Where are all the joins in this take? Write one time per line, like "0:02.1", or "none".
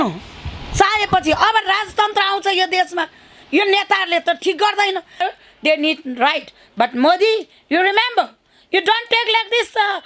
0:05.2